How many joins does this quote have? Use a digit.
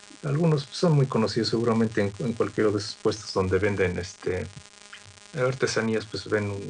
1